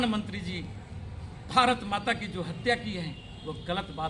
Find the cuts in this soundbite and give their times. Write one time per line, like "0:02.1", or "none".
none